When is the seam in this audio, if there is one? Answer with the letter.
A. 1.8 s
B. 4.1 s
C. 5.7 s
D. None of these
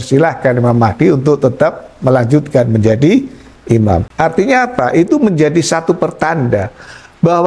B